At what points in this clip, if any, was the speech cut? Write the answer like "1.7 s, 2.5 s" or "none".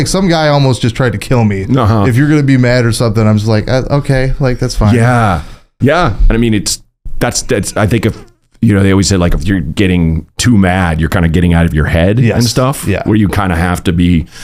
none